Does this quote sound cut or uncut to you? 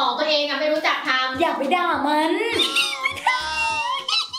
uncut